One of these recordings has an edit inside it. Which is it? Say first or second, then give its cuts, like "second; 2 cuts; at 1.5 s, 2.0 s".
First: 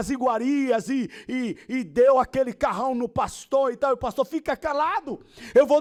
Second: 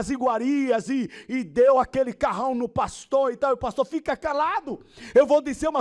second; 1 cut; at 1.2 s